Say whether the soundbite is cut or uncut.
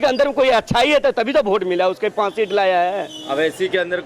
uncut